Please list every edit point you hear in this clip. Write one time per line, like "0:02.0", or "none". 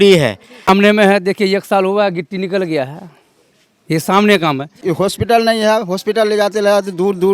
0:00.7
0:04.8